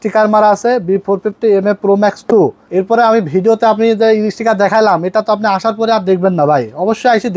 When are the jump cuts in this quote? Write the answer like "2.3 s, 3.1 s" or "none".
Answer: none